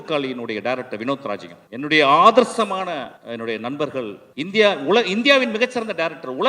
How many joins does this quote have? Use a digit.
3